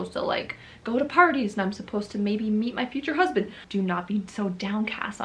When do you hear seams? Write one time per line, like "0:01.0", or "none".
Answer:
0:03.6